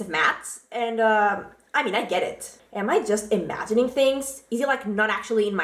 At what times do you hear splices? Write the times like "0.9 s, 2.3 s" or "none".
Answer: 2.6 s